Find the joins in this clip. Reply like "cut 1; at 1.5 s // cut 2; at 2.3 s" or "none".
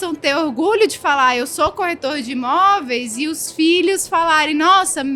none